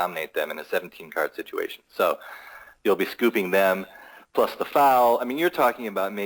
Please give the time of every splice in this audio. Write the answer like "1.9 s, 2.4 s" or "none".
none

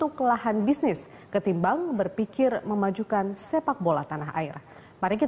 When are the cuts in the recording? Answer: 1.3 s

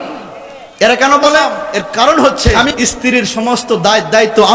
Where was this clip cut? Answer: 1.6 s

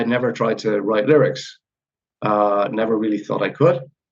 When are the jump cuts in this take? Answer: none

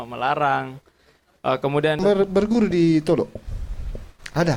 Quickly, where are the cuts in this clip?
2.0 s

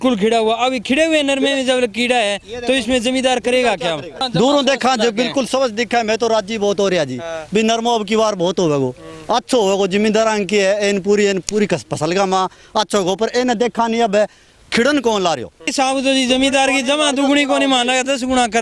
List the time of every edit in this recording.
4.2 s, 15.7 s

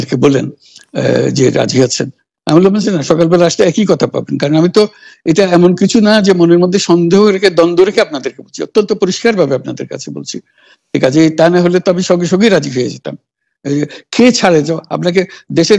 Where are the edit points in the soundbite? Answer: none

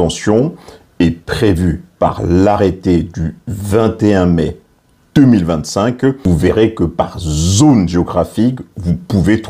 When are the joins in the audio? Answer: 6.2 s

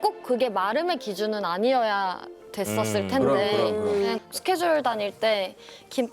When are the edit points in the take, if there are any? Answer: 4.1 s

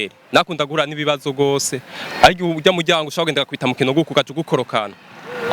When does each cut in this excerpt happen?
none

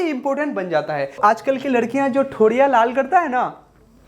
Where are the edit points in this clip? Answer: 1.2 s

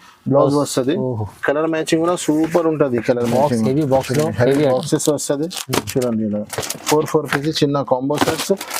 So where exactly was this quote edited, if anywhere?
none

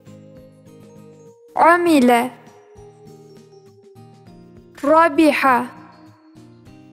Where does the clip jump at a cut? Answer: 1.2 s, 2.4 s, 4.8 s, 5.8 s

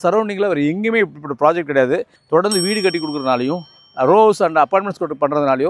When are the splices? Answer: 2.2 s

